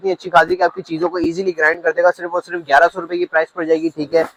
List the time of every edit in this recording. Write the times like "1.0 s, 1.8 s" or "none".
none